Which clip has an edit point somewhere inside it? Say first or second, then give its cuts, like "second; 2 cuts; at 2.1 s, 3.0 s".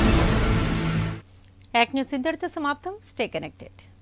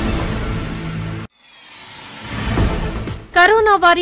second; 2 cuts; at 1.0 s, 2.8 s